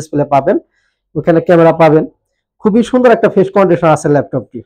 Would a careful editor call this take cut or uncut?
uncut